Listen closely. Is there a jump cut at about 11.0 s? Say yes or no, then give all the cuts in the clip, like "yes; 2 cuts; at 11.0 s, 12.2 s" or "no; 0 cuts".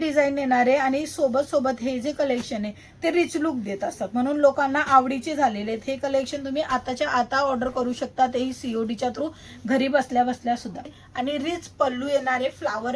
yes; 1 cut; at 11.0 s